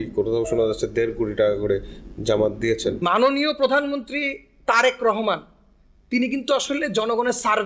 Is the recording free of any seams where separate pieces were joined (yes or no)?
no